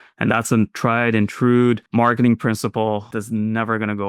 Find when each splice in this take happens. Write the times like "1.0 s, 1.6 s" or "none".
1.8 s, 3.1 s